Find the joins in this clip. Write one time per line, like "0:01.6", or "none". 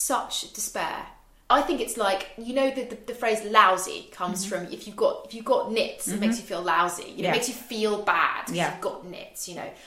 0:01.5